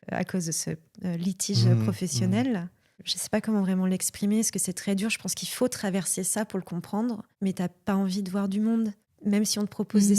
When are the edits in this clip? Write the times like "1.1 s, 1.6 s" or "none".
3.0 s